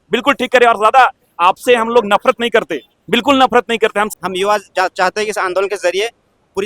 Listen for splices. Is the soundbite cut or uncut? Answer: cut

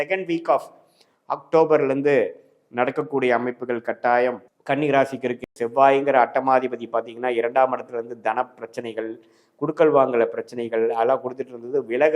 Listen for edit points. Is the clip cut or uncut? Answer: cut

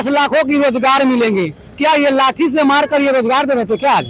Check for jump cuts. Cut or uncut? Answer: uncut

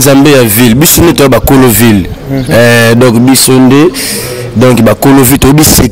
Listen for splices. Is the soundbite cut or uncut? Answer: uncut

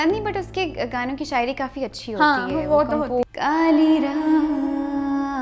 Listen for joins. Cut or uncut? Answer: cut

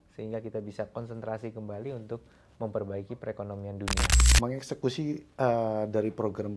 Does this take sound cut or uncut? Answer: cut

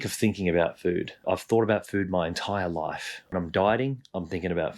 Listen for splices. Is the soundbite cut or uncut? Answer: cut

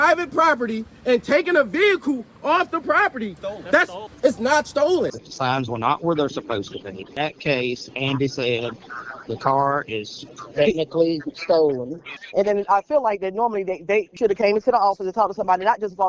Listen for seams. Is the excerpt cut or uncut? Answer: cut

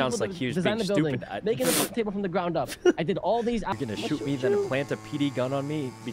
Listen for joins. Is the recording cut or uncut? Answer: cut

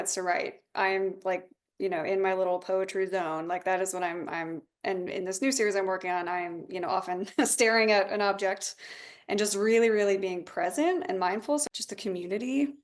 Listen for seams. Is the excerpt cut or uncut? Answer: cut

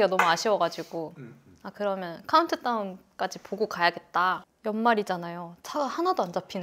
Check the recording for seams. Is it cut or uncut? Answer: uncut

